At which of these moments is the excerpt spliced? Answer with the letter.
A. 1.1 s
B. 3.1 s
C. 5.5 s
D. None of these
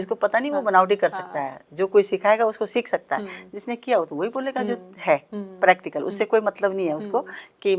D